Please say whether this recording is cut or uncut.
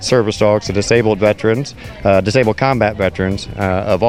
uncut